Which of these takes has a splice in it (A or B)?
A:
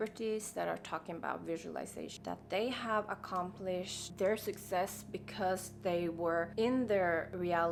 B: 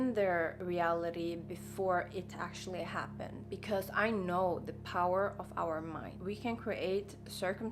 B